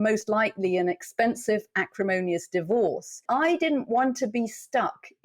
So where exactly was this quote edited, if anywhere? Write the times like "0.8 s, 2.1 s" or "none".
3.2 s